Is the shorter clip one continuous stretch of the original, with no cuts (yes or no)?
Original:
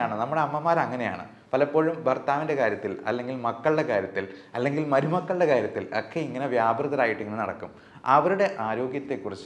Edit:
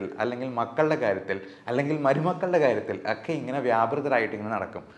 yes